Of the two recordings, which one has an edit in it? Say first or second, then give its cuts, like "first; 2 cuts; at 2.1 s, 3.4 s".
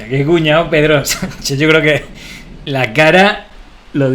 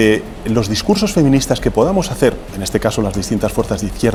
first; 1 cut; at 2.6 s